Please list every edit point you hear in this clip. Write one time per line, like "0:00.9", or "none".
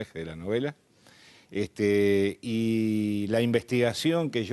0:01.4